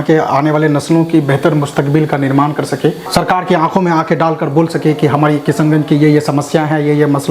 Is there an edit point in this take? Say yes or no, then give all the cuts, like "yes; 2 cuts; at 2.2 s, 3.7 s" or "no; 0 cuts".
yes; 1 cut; at 3.0 s